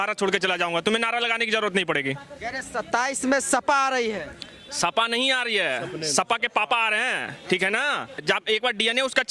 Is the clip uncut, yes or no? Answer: yes